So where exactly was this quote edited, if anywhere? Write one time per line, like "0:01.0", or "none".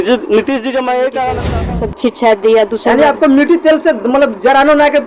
0:01.5